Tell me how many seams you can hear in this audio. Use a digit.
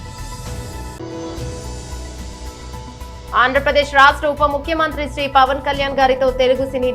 0